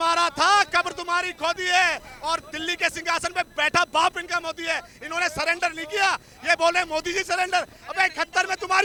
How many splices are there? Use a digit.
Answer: 0